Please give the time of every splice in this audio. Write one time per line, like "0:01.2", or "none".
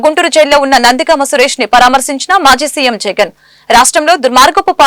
none